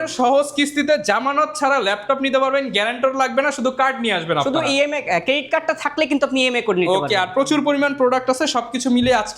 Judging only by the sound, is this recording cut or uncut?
uncut